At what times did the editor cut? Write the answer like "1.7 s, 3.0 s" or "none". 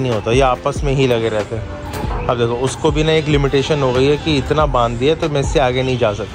none